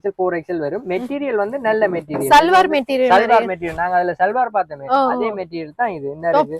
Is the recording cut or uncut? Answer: uncut